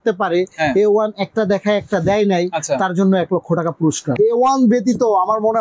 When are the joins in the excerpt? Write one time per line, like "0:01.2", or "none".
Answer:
0:04.1